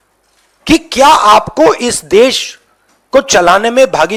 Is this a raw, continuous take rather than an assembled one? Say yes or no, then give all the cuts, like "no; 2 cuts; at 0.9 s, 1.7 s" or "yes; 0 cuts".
yes; 0 cuts